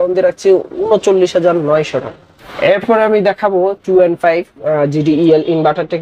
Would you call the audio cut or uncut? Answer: uncut